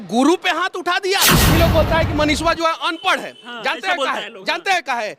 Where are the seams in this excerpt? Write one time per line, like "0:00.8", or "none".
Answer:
0:01.4

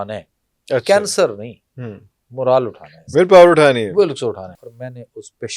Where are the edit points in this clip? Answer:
0:04.6

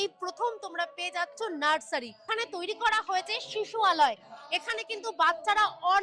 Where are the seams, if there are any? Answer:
0:02.3

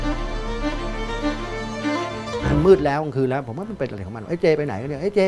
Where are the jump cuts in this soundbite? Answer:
0:02.4

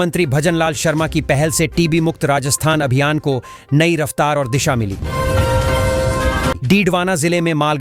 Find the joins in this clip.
none

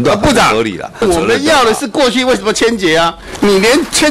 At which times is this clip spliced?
0:01.0

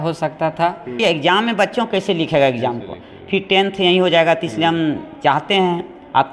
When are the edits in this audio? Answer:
0:01.0

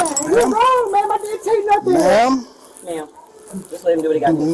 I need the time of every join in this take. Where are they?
none

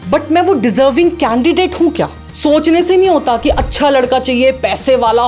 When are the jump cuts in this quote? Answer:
0:02.2

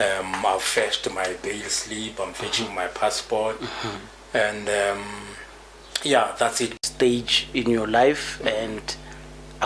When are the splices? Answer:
0:06.8

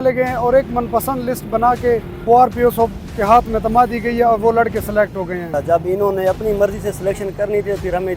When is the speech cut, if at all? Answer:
0:02.1
0:05.5

